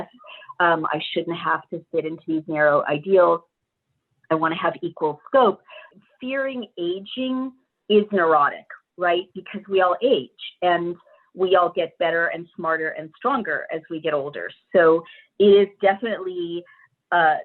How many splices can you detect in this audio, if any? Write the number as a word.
one